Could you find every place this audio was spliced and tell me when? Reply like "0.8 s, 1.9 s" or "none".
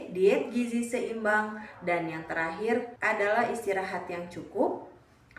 2.9 s